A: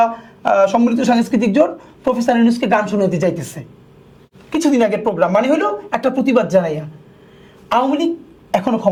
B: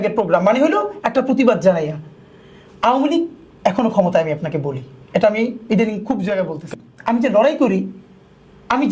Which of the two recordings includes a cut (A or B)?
B